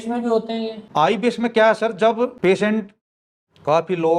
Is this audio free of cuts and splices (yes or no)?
no